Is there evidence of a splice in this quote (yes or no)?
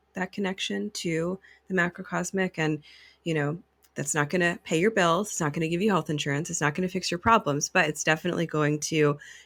no